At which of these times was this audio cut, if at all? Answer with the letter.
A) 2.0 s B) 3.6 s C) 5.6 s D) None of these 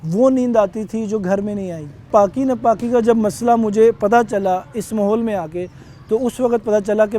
A